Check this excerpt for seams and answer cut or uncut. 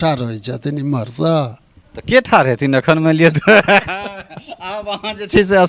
uncut